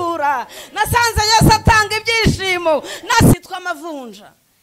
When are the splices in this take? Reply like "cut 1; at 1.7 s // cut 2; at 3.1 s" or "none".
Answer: cut 1; at 3.3 s